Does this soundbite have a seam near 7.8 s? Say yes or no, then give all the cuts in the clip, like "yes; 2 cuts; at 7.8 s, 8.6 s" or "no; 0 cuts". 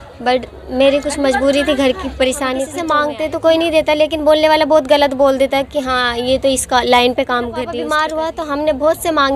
yes; 2 cuts; at 2.7 s, 7.8 s